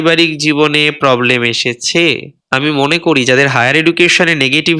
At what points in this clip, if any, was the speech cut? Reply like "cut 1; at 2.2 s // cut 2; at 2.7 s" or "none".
cut 1; at 2.3 s

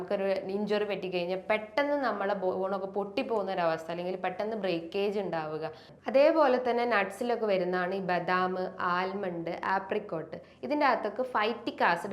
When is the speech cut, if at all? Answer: cut 1; at 5.9 s

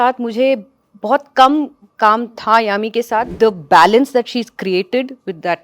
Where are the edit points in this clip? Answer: cut 1; at 3.3 s

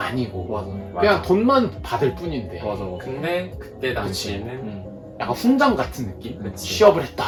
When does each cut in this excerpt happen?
none

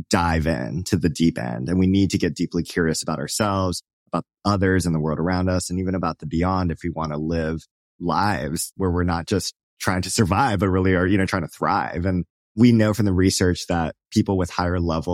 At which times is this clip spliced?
cut 1; at 7.8 s // cut 2; at 8.7 s // cut 3; at 11.3 s

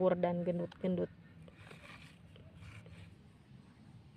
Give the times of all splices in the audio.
cut 1; at 3.1 s

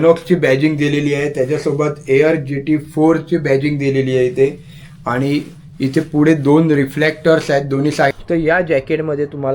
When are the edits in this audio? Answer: cut 1; at 8.2 s

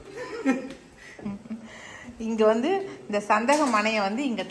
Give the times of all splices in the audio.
none

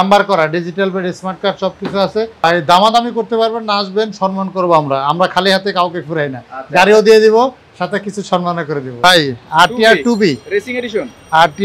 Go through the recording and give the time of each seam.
cut 1; at 2.4 s // cut 2; at 9.0 s

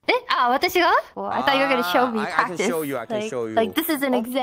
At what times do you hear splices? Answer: cut 1; at 1.2 s

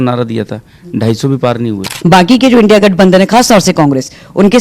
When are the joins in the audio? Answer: cut 1; at 1.9 s

